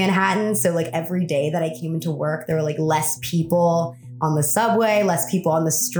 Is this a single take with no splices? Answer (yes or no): yes